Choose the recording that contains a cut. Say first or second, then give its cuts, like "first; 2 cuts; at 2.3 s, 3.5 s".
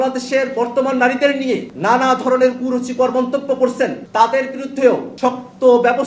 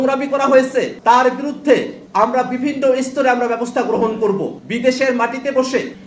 second; 1 cut; at 4.6 s